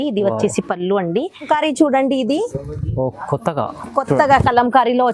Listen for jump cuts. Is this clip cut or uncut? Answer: cut